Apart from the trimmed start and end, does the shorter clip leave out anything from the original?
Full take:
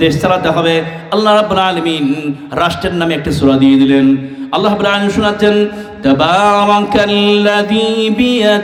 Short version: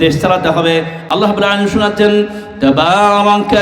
yes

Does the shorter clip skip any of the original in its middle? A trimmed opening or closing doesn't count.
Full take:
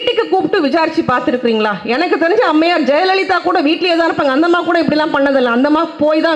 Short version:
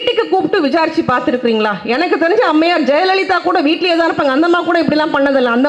no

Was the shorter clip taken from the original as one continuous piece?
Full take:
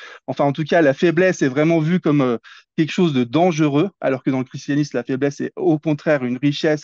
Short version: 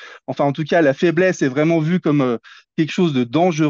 yes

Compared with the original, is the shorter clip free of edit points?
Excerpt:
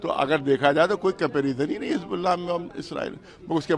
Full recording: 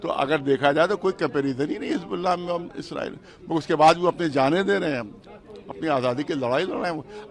yes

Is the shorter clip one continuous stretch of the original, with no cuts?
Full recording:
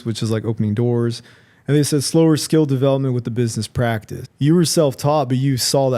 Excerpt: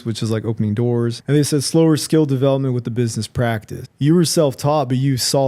no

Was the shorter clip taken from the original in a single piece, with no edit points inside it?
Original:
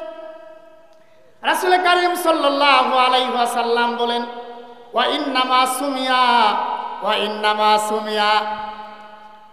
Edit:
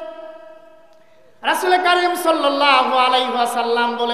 yes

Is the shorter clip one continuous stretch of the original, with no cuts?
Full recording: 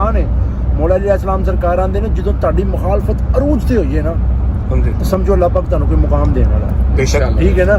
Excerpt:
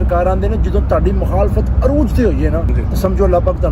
no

